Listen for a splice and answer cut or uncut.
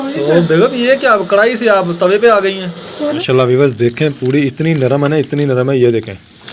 cut